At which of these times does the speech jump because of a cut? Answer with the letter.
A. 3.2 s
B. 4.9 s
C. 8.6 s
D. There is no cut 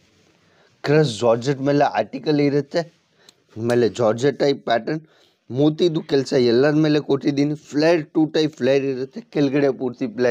D